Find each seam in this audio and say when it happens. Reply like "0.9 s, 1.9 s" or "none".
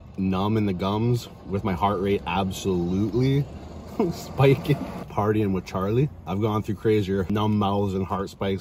5.0 s, 6.2 s, 7.3 s